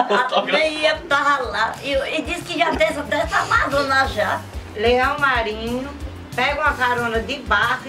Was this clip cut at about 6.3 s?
no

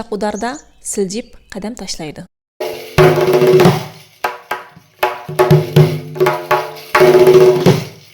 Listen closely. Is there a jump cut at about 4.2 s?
no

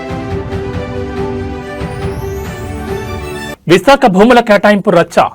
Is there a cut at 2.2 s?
no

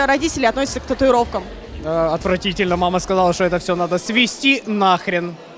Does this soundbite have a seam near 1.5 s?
no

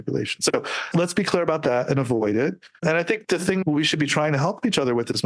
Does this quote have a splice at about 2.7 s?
yes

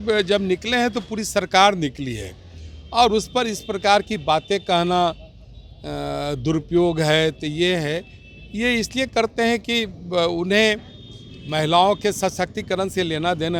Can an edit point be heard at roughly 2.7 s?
no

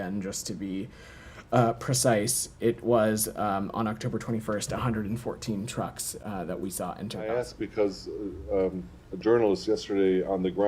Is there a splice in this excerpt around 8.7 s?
no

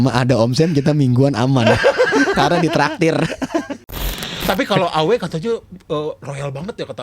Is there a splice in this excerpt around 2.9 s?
no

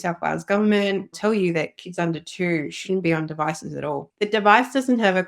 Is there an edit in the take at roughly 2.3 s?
no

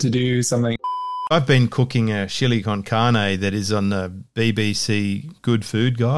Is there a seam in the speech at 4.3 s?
no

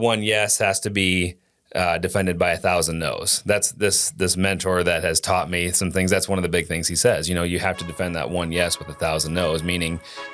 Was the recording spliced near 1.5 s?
no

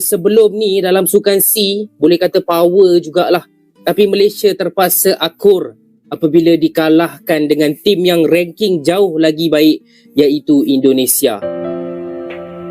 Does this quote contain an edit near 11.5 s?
yes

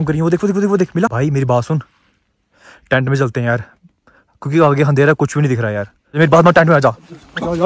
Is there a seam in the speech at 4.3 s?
no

